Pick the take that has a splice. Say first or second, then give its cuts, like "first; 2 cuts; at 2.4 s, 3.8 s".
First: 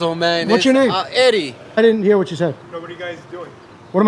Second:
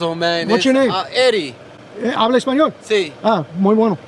first; 1 cut; at 1.8 s